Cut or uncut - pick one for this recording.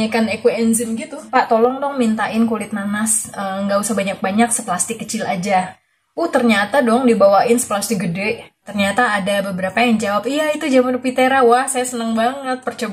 cut